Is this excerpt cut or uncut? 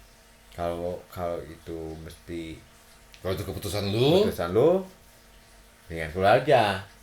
uncut